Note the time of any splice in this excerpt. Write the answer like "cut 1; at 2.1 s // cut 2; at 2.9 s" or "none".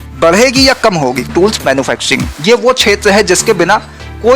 cut 1; at 1.3 s